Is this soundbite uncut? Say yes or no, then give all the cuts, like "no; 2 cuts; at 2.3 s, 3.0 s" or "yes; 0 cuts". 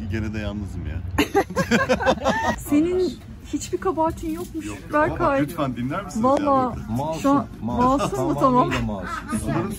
no; 1 cut; at 2.6 s